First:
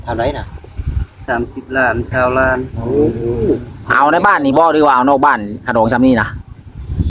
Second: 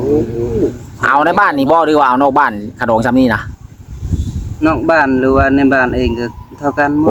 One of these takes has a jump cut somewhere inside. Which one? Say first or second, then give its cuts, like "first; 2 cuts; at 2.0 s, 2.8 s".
first; 1 cut; at 1.3 s